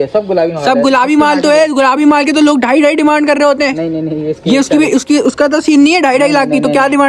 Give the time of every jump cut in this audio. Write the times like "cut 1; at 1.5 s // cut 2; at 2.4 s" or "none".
none